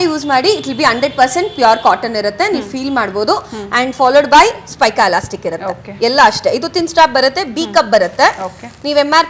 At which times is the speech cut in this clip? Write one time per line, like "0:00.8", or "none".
none